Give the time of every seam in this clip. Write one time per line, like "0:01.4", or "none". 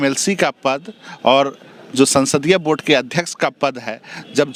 none